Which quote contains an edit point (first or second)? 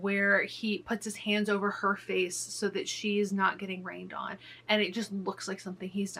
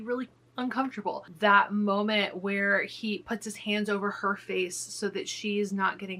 second